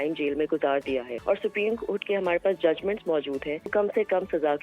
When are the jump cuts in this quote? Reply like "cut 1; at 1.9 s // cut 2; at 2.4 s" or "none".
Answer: cut 1; at 1.1 s // cut 2; at 3.7 s